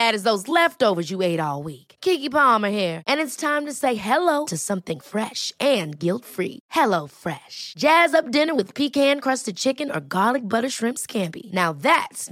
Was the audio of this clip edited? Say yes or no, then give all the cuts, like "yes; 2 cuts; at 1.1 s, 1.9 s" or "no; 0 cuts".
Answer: no; 0 cuts